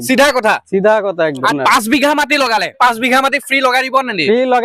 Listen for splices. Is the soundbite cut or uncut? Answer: cut